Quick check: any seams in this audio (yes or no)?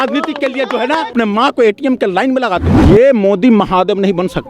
yes